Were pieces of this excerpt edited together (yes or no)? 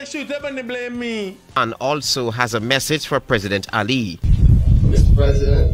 yes